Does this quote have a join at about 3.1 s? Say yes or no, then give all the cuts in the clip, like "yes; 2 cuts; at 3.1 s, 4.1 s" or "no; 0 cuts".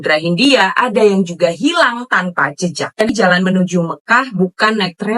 yes; 1 cut; at 3.1 s